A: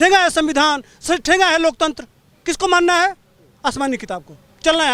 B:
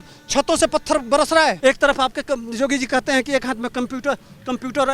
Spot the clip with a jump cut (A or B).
B